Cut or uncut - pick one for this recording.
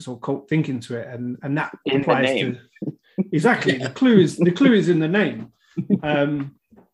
uncut